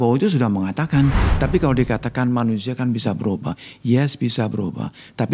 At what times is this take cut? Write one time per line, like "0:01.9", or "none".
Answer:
0:01.3